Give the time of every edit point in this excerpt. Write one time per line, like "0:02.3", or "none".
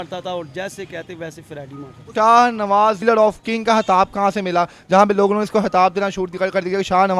0:02.1
0:03.0